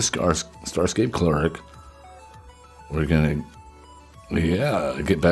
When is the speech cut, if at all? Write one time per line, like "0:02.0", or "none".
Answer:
none